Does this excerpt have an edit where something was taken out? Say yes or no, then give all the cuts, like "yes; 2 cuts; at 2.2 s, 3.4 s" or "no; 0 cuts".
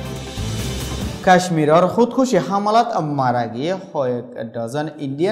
yes; 1 cut; at 1.2 s